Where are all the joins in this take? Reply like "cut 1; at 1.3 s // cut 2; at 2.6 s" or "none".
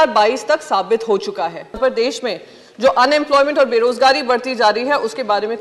cut 1; at 1.7 s